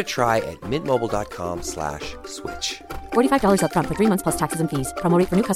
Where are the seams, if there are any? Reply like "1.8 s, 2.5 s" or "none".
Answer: none